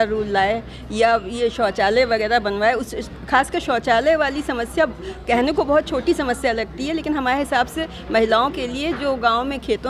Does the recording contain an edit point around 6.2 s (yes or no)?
no